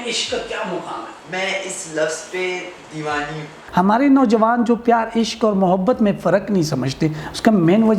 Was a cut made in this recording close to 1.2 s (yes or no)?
yes